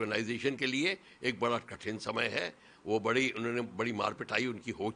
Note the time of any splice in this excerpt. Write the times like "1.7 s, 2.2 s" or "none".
none